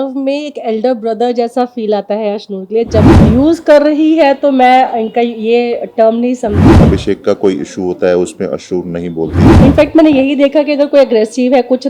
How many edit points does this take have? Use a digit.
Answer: 3